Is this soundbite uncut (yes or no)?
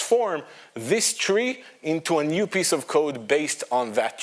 yes